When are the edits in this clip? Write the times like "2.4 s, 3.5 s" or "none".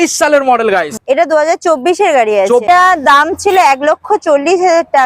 1.0 s, 2.6 s